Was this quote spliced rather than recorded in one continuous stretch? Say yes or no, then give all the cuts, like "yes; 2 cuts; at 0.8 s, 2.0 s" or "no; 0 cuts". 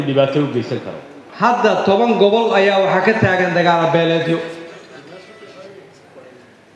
yes; 1 cut; at 1.3 s